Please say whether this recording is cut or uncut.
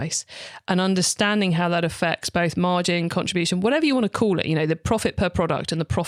uncut